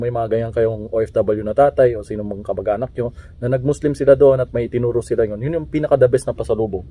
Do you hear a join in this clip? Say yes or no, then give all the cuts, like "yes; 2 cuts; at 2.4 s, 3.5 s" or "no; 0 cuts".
no; 0 cuts